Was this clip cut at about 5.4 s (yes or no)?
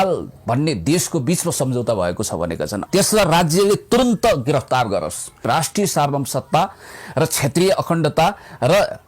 yes